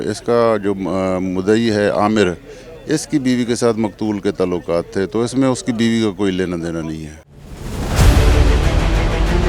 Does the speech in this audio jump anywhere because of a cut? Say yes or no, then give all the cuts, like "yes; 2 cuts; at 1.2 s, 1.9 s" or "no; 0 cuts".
no; 0 cuts